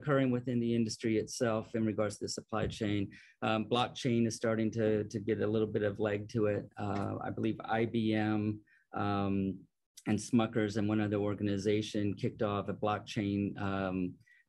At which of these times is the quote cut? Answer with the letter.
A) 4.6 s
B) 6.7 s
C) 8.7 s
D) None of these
D